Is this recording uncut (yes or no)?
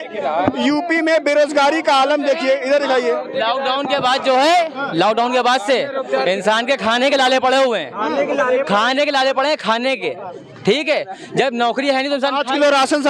yes